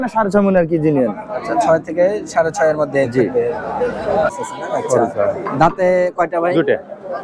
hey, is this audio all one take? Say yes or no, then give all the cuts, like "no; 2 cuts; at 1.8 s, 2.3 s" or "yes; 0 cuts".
no; 1 cut; at 4.3 s